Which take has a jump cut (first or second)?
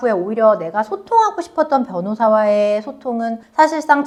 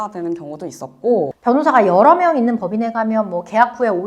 second